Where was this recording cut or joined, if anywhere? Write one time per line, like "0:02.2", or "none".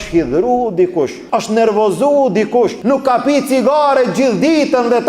0:01.2
0:02.8